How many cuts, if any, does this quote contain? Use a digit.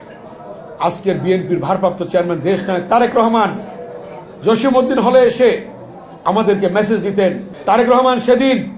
1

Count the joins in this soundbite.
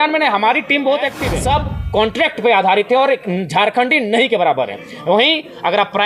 1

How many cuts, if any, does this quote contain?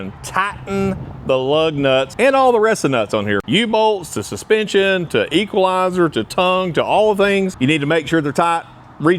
3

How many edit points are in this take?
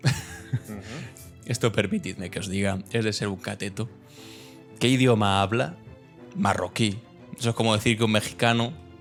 0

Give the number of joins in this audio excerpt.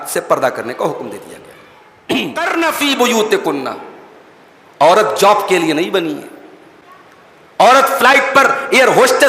1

